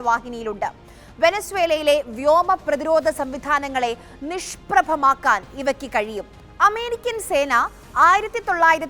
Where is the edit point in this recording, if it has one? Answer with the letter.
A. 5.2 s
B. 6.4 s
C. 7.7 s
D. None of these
B